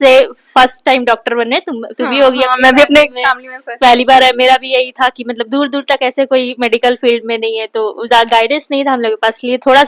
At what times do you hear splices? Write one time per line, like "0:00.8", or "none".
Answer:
none